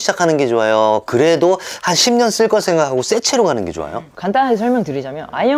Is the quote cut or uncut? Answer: uncut